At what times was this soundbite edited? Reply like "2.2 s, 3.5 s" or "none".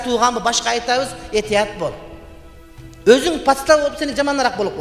none

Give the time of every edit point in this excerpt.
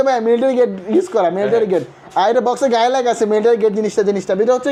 none

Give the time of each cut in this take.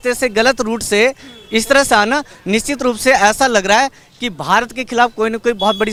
none

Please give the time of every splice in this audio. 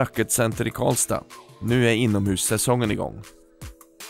3.2 s

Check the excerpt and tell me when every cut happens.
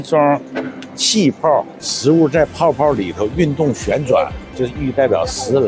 1.8 s, 4.6 s

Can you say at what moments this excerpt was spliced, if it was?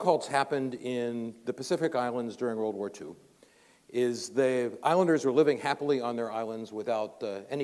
3.2 s

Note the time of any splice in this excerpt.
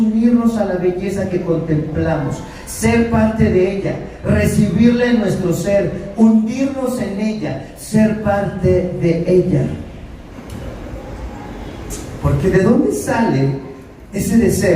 10.3 s

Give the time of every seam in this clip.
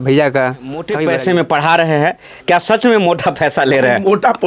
1.0 s

